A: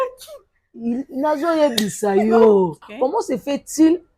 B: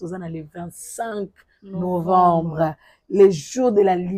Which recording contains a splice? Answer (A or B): A